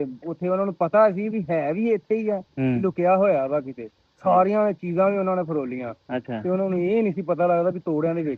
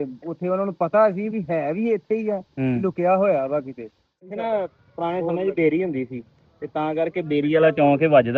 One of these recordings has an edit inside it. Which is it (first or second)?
second